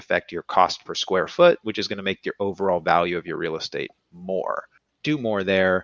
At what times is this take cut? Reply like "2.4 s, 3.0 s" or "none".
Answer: 4.7 s